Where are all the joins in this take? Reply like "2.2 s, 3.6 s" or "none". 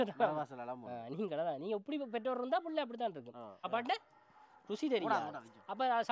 3.5 s